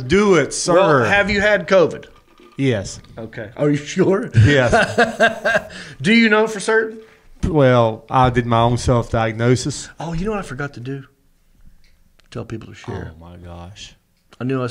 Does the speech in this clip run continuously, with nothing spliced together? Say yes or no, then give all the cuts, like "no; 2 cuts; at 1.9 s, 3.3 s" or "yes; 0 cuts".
yes; 0 cuts